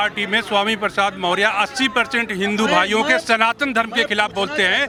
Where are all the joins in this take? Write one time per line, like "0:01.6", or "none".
none